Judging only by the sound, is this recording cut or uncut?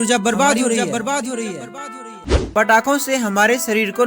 cut